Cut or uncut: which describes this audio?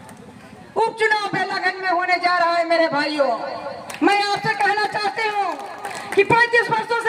cut